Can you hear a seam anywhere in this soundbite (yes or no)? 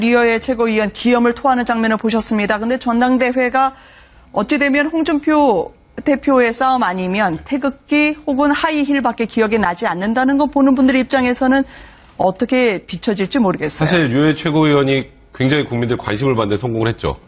yes